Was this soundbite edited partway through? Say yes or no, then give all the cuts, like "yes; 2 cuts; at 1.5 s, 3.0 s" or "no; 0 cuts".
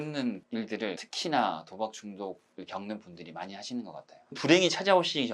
yes; 1 cut; at 4.3 s